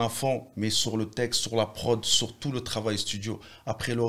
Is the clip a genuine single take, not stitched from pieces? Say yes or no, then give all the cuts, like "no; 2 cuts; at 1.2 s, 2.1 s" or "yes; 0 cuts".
yes; 0 cuts